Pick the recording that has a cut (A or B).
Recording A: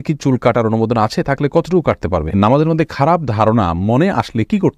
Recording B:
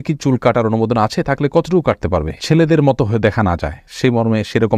A